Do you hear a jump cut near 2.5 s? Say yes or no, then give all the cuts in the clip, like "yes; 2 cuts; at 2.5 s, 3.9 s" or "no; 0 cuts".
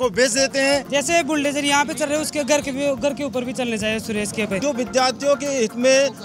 no; 2 cuts; at 0.9 s, 4.6 s